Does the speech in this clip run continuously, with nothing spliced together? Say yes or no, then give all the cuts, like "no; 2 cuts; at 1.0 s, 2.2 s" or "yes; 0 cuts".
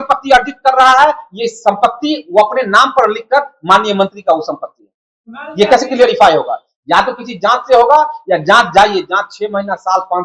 yes; 0 cuts